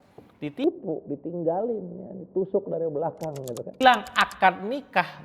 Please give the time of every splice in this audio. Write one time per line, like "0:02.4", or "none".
0:03.8